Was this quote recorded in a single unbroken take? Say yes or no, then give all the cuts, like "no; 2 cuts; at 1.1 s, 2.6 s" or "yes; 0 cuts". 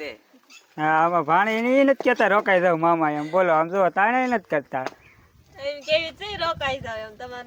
yes; 0 cuts